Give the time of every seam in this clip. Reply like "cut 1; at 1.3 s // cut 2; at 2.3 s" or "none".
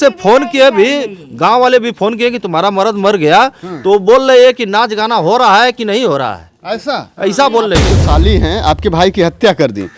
cut 1; at 7.9 s